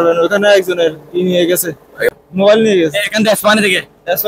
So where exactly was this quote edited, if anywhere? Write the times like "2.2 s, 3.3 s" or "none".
2.1 s